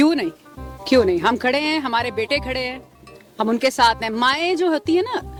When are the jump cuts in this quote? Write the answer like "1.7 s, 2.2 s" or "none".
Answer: none